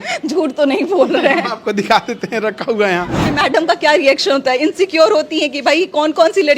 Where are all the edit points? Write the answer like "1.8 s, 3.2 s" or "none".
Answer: 3.3 s